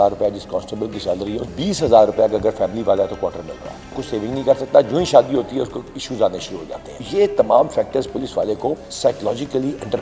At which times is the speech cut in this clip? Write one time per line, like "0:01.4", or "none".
0:01.5
0:04.1
0:07.1
0:08.9